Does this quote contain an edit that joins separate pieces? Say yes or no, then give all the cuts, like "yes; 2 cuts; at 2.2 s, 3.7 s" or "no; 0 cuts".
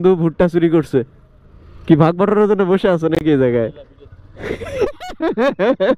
no; 0 cuts